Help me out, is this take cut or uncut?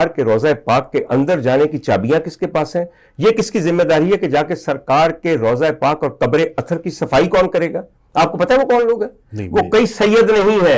uncut